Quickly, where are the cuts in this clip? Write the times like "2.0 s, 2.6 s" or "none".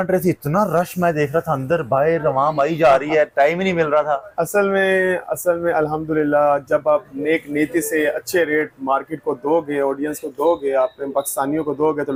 none

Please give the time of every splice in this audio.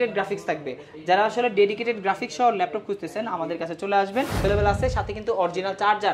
4.4 s

